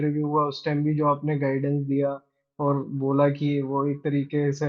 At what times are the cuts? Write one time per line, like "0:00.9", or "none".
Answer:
none